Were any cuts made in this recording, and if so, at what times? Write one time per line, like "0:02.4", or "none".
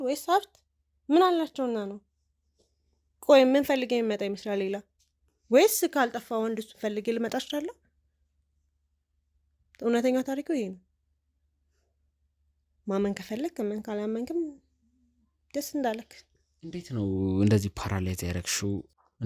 none